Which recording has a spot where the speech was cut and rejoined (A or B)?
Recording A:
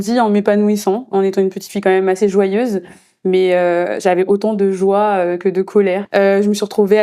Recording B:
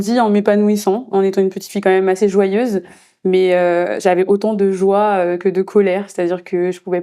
A